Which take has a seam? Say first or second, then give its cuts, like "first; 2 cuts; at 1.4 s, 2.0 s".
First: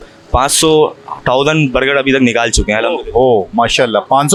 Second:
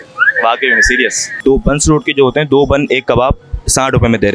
second; 1 cut; at 1.4 s